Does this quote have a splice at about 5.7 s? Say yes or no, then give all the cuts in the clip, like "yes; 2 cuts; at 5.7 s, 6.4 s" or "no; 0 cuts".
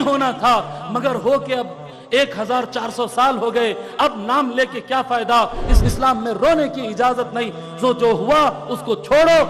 yes; 1 cut; at 5.7 s